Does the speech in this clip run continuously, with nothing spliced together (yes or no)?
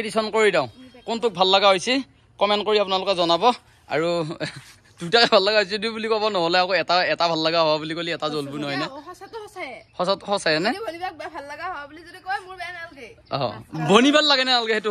yes